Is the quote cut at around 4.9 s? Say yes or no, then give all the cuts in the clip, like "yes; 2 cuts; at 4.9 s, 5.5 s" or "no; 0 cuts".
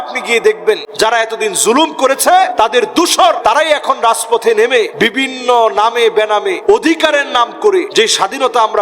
yes; 6 cuts; at 0.9 s, 2.5 s, 3.4 s, 4.9 s, 6.6 s, 7.9 s